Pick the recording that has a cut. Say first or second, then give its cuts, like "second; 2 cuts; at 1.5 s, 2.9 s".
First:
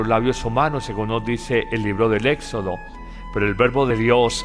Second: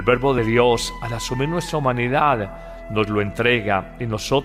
first; 1 cut; at 2.4 s